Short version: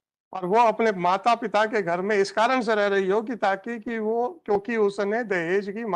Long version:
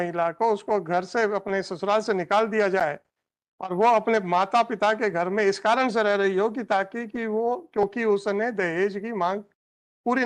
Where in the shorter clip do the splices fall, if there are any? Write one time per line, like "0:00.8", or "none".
none